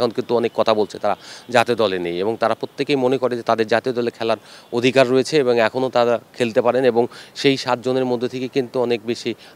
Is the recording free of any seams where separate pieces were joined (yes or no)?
yes